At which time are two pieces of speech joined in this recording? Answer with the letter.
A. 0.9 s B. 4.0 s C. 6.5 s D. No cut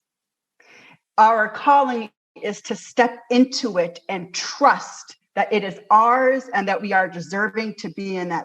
A